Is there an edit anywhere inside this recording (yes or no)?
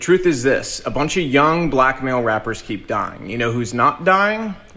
no